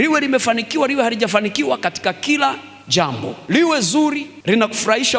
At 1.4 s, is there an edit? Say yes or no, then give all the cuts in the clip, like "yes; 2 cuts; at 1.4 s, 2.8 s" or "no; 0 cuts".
no; 2 cuts; at 3.3 s, 4.3 s